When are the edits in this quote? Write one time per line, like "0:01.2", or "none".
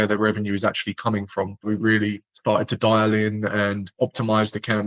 0:01.7